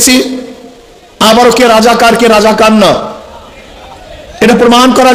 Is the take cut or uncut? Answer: uncut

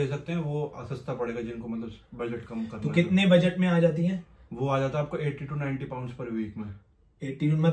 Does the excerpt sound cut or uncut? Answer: uncut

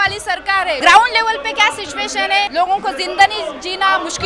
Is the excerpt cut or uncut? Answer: cut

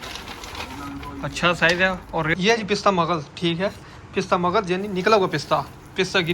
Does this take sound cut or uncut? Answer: cut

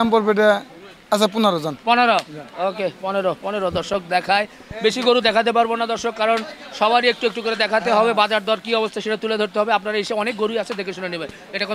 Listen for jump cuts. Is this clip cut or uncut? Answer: uncut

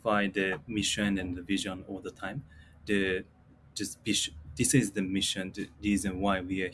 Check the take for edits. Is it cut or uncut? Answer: uncut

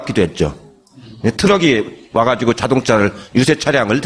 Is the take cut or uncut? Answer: uncut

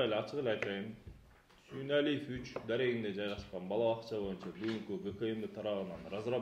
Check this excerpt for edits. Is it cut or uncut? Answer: uncut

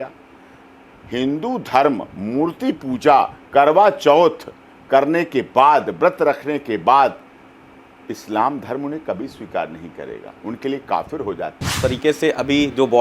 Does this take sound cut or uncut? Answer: cut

